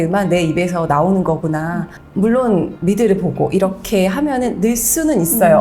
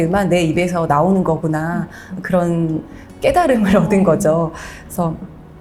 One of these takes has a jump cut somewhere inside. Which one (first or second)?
first